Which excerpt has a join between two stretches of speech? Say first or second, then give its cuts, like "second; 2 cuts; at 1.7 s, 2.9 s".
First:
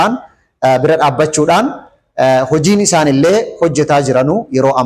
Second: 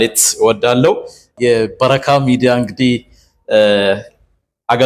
second; 1 cut; at 1.3 s